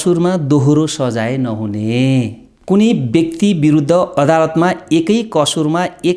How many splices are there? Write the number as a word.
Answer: one